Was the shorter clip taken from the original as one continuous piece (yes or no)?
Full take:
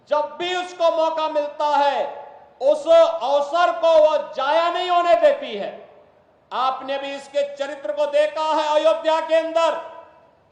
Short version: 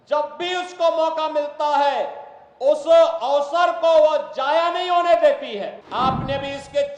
no